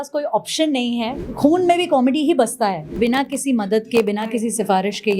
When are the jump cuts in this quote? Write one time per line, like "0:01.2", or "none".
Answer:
0:01.1
0:02.9